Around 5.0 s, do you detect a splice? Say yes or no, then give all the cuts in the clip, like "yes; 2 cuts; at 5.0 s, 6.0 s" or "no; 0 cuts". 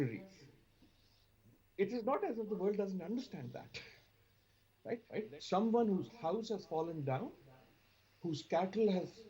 yes; 1 cut; at 5.0 s